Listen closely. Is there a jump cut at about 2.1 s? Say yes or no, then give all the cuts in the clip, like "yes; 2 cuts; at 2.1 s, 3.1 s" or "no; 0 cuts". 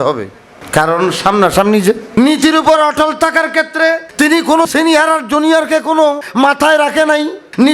yes; 1 cut; at 2.1 s